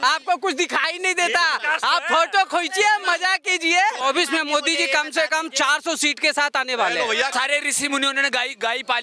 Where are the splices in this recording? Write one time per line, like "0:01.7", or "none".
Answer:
0:04.0
0:07.3